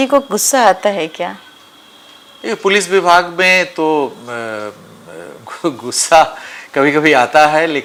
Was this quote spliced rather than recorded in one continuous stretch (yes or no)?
no